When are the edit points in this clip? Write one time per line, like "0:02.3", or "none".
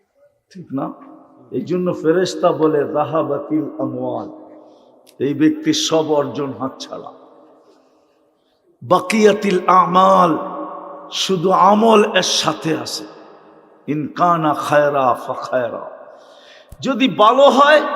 none